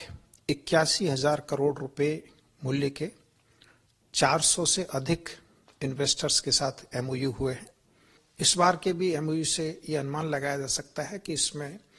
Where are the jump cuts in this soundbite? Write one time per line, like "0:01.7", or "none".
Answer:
0:08.2